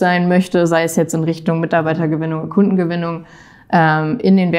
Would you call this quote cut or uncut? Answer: uncut